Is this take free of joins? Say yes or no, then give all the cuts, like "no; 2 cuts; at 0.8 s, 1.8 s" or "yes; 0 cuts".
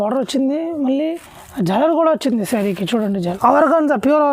no; 1 cut; at 3.2 s